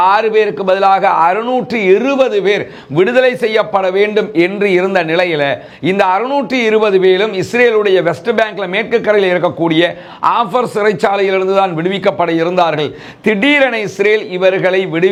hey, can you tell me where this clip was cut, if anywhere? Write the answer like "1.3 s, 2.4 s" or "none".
none